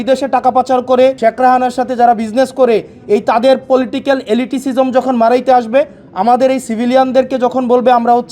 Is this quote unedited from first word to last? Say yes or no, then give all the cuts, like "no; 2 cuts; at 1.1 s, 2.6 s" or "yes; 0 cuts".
no; 1 cut; at 1.2 s